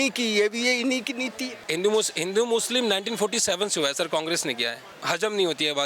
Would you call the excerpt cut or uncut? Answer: cut